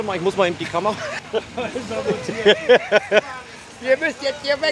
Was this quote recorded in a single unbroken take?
yes; 0 cuts

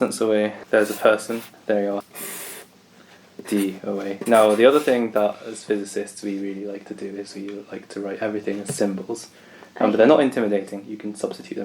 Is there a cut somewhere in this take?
yes; 1 cut; at 2.0 s

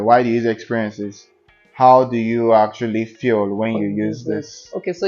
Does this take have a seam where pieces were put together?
no; 0 cuts

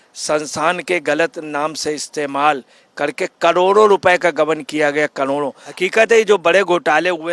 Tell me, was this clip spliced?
yes; 1 cut; at 5.7 s

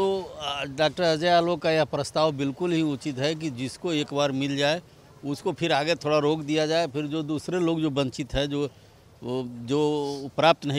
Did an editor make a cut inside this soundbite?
no; 0 cuts

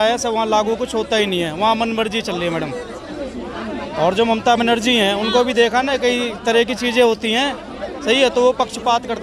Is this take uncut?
yes; 0 cuts

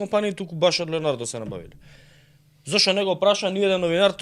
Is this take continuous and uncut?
yes; 0 cuts

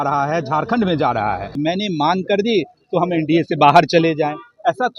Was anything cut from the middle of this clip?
yes; 1 cut; at 1.5 s

